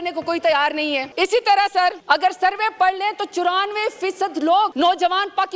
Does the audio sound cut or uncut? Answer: cut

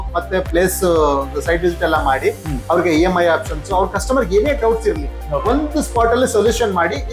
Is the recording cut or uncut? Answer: uncut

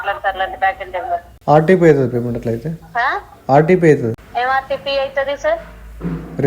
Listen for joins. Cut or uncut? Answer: cut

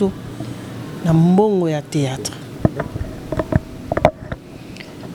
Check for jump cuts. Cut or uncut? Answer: uncut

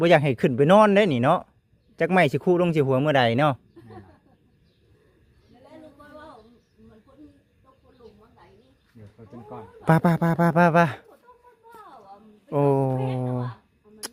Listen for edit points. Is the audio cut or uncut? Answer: uncut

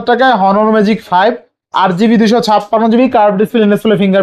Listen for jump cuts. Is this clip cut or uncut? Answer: uncut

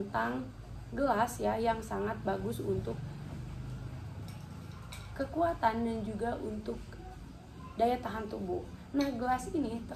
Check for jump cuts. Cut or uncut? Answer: uncut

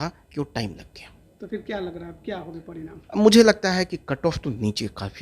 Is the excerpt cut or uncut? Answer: uncut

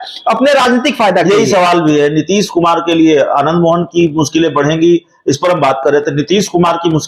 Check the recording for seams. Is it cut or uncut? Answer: uncut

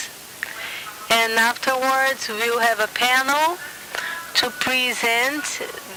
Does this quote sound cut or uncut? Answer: uncut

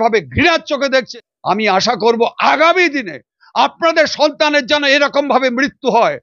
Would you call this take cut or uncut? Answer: cut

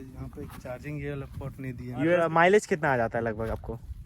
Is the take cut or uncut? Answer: cut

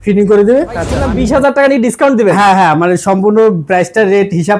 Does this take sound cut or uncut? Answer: cut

